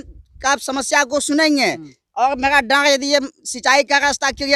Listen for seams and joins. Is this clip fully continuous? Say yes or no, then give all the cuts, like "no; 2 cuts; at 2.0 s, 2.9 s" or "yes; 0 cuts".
yes; 0 cuts